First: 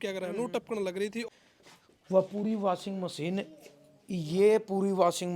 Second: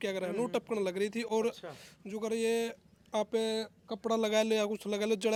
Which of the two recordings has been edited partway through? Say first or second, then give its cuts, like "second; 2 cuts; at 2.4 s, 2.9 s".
first; 1 cut; at 1.3 s